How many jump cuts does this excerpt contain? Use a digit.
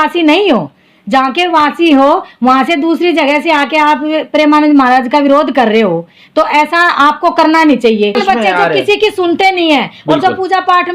1